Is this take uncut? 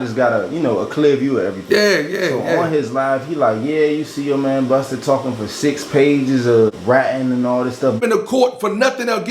no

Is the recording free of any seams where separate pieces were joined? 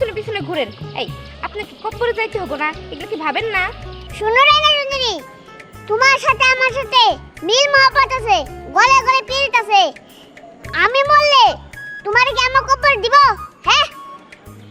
yes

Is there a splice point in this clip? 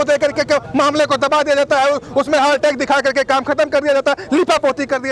no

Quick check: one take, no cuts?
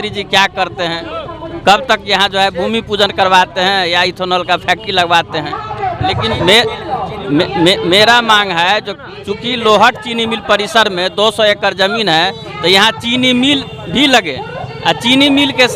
yes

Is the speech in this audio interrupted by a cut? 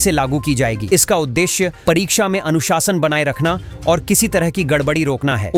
no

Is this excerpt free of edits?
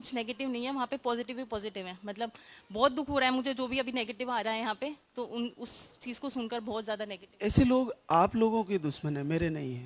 yes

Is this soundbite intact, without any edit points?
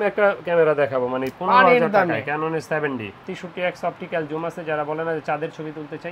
no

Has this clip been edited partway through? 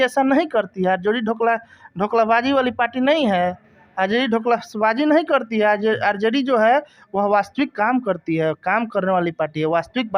no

